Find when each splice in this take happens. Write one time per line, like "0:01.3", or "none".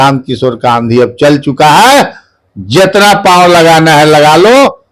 none